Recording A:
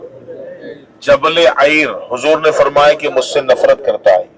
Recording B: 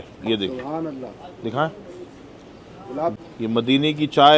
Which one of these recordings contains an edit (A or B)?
B